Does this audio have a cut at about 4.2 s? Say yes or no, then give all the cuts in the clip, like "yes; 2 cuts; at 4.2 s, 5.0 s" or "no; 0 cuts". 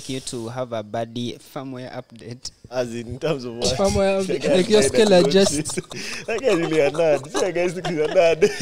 no; 1 cut; at 1.4 s